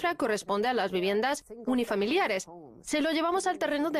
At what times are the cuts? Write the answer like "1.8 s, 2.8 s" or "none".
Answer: 1.5 s